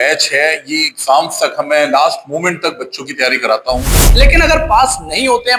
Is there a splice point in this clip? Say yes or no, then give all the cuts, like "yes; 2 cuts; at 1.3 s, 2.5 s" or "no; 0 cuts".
yes; 1 cut; at 4.1 s